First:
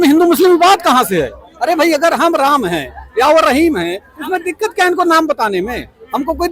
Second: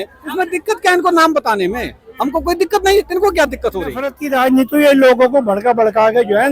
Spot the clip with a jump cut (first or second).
second